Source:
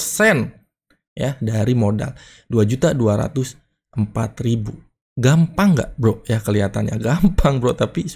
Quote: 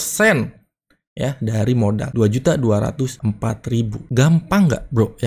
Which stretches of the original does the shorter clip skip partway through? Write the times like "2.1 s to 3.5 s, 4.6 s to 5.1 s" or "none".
2.1 s to 2.4 s, 3.9 s to 4.6 s

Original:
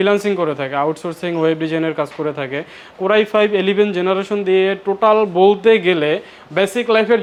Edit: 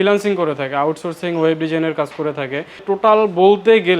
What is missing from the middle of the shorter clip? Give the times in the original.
2.8 s to 4.8 s

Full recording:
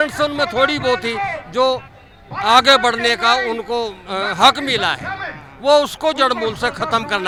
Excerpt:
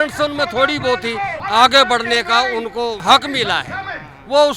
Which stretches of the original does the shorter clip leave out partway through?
1.4 s to 2.3 s, 3.9 s to 4.3 s

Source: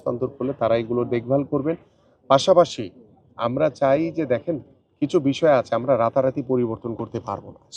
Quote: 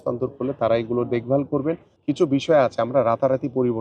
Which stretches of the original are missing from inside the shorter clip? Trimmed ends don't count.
1.9 s to 4.8 s

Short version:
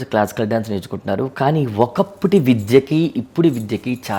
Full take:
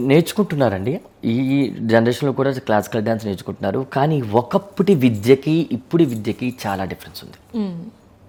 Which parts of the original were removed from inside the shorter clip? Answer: none

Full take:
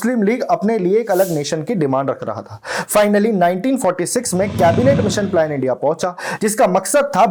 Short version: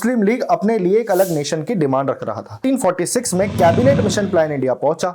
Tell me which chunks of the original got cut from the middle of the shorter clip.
2.6 s to 3.6 s

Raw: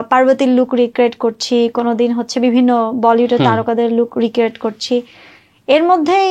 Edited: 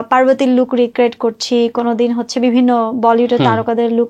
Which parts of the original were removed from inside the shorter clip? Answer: none

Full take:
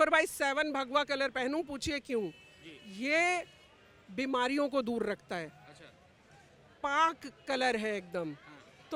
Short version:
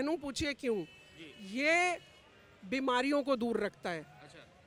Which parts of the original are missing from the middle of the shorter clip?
none

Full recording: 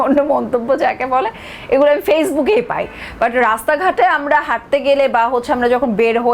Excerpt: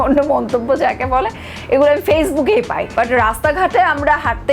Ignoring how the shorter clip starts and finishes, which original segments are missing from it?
2.8 s to 3.0 s

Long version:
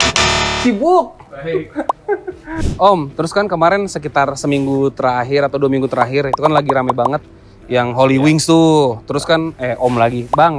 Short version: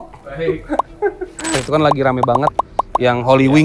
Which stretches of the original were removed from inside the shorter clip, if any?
2.7 s to 6.3 s

